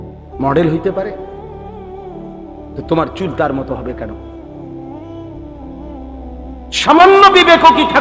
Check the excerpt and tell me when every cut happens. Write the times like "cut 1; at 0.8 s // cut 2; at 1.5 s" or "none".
cut 1; at 1.5 s // cut 2; at 2.8 s // cut 3; at 4.5 s // cut 4; at 6.1 s